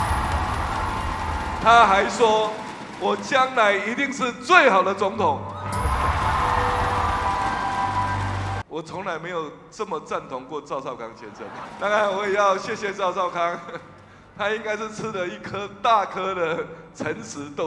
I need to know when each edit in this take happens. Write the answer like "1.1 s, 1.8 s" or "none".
8.6 s, 11.6 s